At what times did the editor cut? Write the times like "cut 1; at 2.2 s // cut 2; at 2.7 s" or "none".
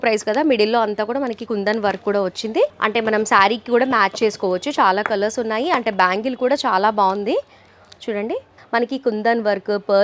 cut 1; at 2.7 s // cut 2; at 8.6 s